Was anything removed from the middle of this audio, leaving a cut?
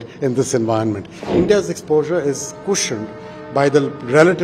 yes; 1 cut; at 1.1 s

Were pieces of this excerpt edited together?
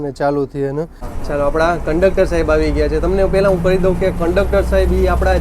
yes; 1 cut; at 1.1 s

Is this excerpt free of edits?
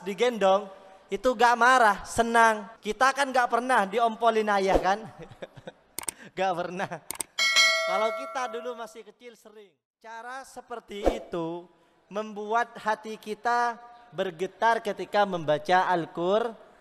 no; 1 cut; at 9.4 s

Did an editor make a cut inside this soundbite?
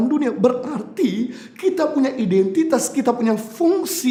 no; 0 cuts

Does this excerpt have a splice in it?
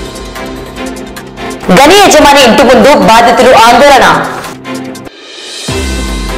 no; 0 cuts

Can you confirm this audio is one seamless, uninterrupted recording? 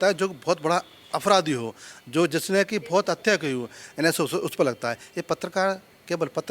no; 1 cut; at 3.8 s

